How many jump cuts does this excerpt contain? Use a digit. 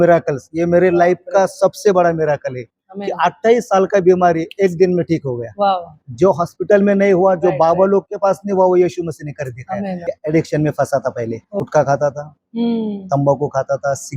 2